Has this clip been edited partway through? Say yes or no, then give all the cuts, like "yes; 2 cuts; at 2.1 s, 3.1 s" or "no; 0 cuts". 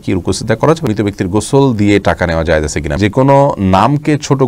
yes; 2 cuts; at 0.8 s, 3.0 s